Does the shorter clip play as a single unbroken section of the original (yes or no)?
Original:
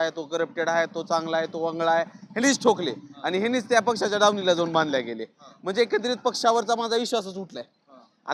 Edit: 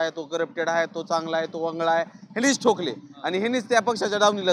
yes